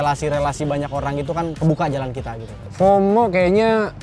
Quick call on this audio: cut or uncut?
cut